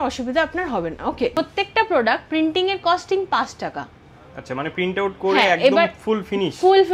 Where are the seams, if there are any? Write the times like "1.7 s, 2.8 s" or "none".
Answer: 1.3 s